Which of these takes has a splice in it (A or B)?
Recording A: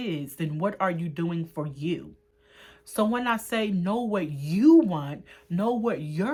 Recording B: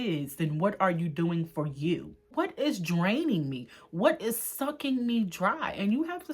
B